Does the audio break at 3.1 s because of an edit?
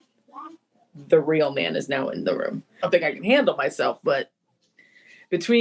yes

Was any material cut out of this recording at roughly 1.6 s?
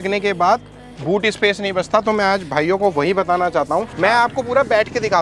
no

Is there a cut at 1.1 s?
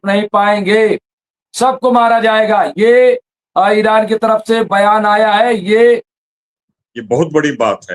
no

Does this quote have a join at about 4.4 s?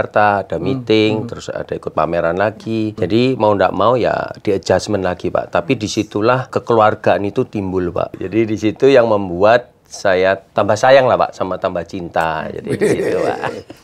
no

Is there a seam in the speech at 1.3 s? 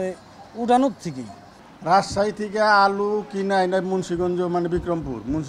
no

